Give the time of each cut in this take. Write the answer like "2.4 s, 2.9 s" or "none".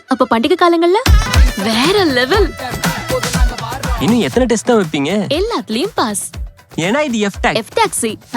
1.3 s